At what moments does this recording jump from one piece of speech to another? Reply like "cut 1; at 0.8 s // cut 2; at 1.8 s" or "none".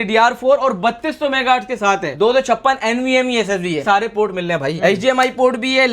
cut 1; at 3.8 s